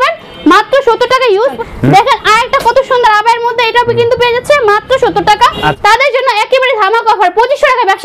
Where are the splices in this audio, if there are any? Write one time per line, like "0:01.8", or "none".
0:01.6
0:05.7